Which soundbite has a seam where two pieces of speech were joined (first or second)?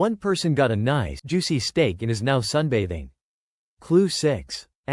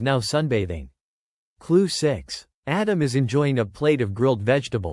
first